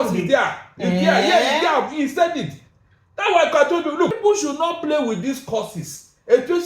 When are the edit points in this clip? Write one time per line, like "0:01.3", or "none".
0:04.2